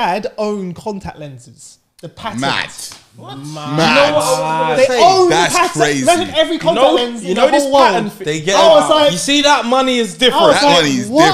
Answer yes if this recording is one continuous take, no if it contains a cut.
yes